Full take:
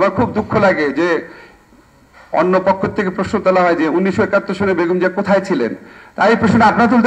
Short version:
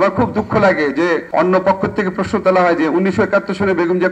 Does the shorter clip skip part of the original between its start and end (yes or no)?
yes